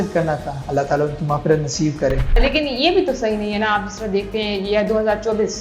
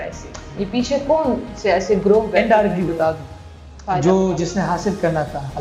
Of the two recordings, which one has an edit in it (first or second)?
first